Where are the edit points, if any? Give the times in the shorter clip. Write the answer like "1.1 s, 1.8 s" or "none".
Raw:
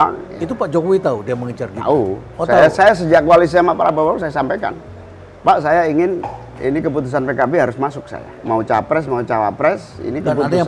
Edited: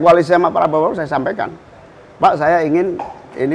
none